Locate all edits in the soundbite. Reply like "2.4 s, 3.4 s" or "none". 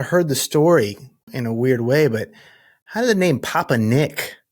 1.3 s